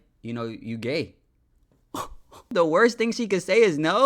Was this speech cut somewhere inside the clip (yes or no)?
yes